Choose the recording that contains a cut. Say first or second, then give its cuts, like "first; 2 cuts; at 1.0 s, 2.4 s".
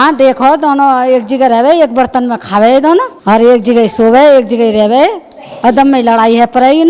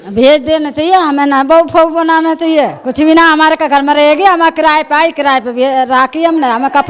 first; 1 cut; at 3.1 s